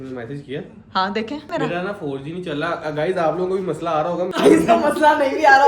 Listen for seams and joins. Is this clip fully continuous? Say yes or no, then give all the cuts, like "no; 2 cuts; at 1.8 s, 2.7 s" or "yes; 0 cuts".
no; 2 cuts; at 1.5 s, 4.3 s